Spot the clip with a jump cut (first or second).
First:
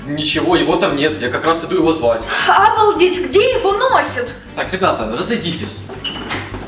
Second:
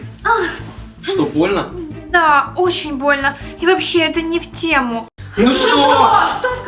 second